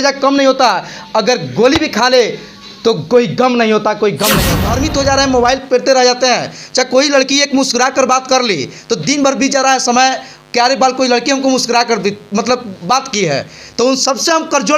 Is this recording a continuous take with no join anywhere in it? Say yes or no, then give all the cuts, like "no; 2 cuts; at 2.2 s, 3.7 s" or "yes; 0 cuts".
no; 1 cut; at 4.5 s